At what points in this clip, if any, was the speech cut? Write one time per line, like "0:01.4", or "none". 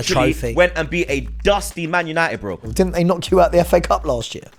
0:02.7